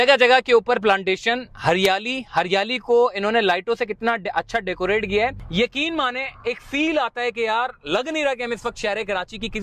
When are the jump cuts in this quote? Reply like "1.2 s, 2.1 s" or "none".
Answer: 5.4 s